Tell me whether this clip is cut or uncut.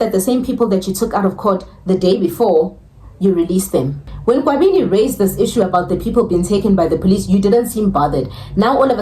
cut